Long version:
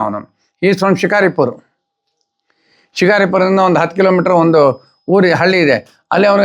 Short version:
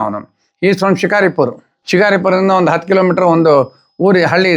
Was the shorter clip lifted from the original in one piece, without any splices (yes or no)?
no